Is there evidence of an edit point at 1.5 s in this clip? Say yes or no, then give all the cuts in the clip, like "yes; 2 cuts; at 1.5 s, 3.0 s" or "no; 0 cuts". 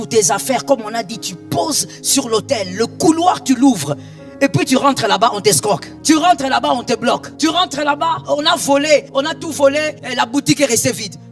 no; 5 cuts; at 5.9 s, 7.3 s, 8.2 s, 9.1 s, 10.0 s